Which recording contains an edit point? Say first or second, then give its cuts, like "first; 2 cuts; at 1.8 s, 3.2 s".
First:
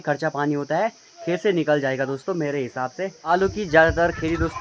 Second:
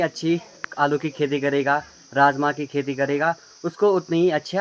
first; 1 cut; at 3.2 s